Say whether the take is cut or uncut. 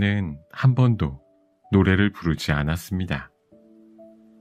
cut